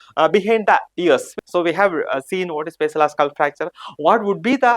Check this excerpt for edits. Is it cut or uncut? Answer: cut